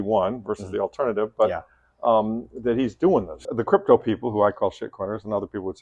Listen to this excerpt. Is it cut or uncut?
cut